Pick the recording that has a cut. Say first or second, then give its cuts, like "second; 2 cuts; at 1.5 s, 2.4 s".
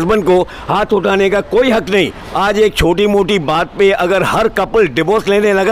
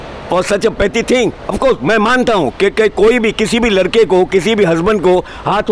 first; 1 cut; at 2.2 s